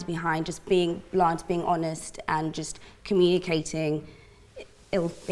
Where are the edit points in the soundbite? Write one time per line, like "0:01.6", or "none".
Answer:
none